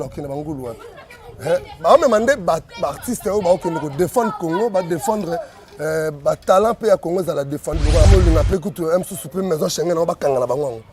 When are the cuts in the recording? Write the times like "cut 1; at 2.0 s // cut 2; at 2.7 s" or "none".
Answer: cut 1; at 8.1 s